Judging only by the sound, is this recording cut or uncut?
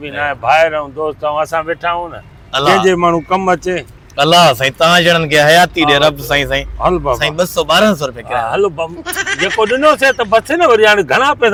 uncut